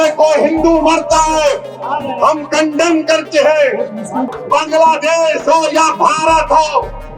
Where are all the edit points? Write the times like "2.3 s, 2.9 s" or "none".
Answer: 4.3 s